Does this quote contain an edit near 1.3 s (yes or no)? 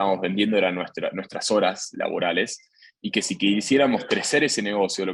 no